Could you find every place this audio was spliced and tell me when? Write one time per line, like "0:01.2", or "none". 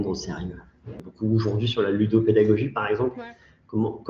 0:01.1